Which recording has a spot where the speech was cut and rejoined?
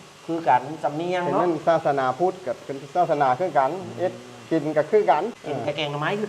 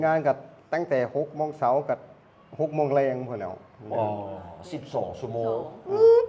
first; 1 cut; at 5.4 s

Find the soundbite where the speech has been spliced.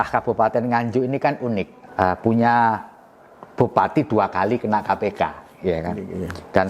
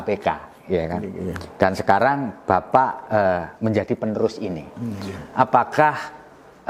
first; 1 cut; at 1.8 s

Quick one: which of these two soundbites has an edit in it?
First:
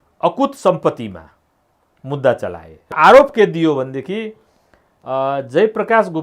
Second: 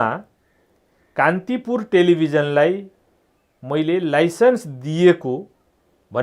first; 1 cut; at 2.9 s

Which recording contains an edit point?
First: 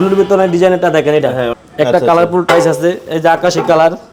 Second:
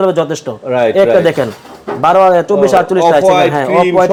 first; 1 cut; at 1.6 s

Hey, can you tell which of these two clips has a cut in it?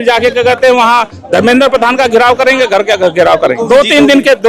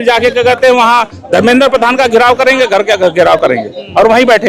first; 1 cut; at 3.6 s

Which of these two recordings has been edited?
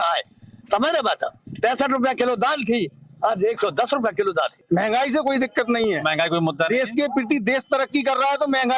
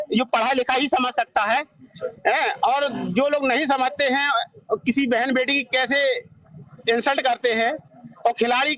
first; 1 cut; at 4.6 s

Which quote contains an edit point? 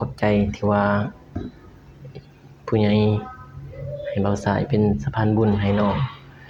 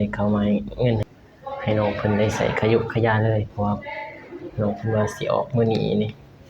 second; 1 cut; at 1.0 s

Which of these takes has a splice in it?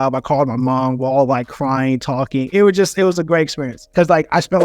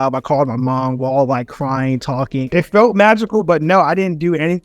second; 1 cut; at 2.5 s

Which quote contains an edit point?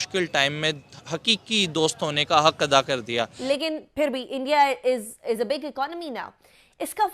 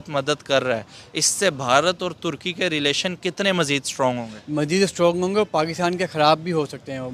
first; 1 cut; at 3.3 s

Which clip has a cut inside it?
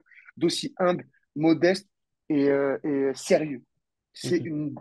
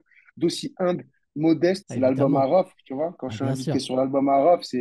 second; 1 cut; at 1.9 s

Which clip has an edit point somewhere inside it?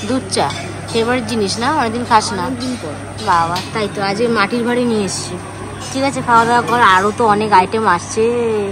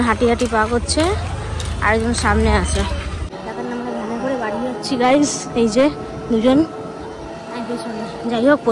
second; 1 cut; at 3.3 s

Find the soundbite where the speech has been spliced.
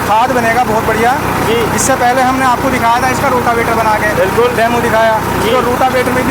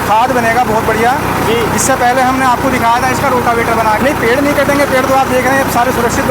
second; 1 cut; at 4.0 s

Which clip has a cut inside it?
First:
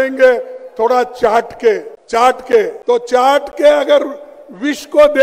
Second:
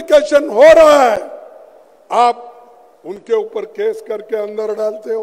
first; 2 cuts; at 1.9 s, 2.8 s

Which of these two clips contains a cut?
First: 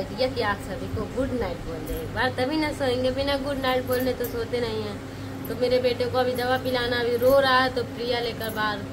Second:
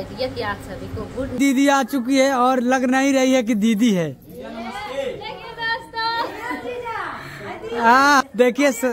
second; 2 cuts; at 1.4 s, 8.2 s

